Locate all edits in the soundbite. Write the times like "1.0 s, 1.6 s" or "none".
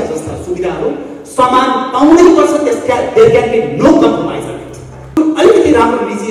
5.1 s